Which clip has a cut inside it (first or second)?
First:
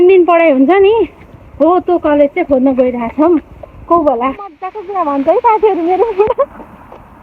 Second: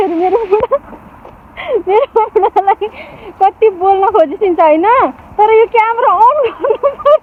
first